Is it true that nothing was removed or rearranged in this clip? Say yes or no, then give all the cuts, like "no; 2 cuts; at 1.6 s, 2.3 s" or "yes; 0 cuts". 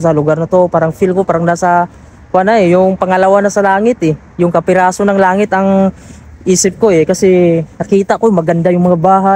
yes; 0 cuts